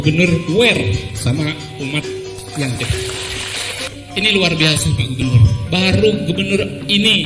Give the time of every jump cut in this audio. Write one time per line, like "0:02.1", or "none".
0:03.9